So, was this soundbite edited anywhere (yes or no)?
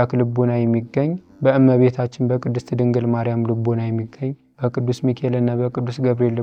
yes